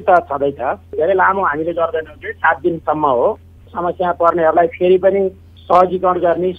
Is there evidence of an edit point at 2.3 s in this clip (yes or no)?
no